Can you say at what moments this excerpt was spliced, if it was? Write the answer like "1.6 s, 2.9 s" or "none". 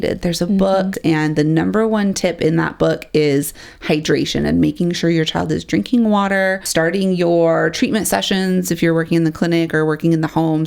1.0 s, 6.7 s